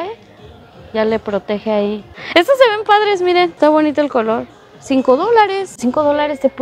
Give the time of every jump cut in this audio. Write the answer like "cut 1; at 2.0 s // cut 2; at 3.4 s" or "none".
cut 1; at 2.1 s // cut 2; at 3.5 s // cut 3; at 5.7 s